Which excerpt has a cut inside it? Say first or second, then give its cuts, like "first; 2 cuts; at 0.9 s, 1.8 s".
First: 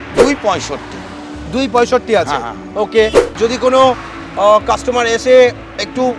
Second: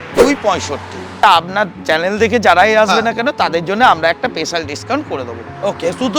second; 1 cut; at 1.2 s